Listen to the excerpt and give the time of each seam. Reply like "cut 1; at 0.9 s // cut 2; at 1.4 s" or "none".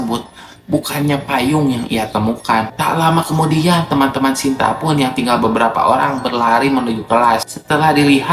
cut 1; at 2.7 s

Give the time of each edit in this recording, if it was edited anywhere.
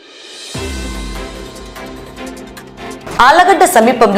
none

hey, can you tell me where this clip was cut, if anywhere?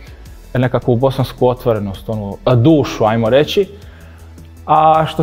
none

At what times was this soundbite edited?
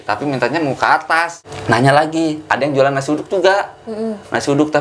cut 1; at 1.5 s

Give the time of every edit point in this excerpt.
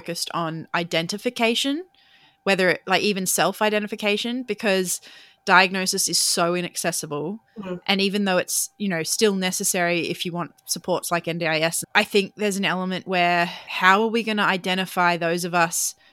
none

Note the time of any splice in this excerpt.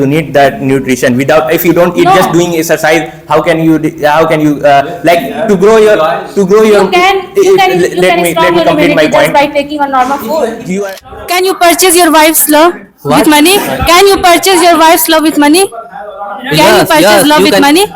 cut 1; at 11.1 s

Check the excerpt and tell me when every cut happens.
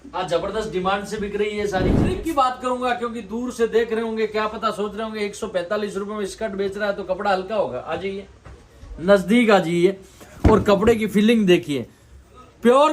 cut 1; at 2.2 s

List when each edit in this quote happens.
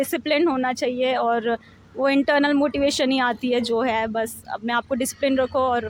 none

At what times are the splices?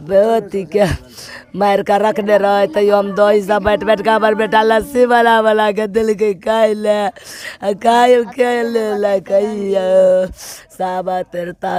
none

